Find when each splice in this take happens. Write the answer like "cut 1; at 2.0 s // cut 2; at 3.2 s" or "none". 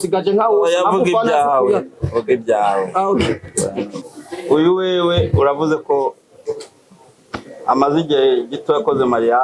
cut 1; at 4.0 s